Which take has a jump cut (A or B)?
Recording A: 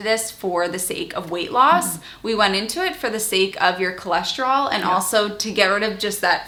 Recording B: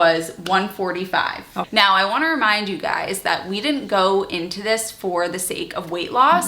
B